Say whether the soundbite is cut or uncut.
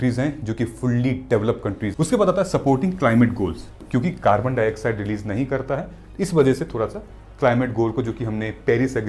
cut